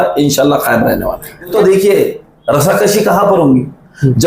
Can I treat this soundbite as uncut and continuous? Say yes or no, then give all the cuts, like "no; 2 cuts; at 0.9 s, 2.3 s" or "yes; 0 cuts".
no; 1 cut; at 1.5 s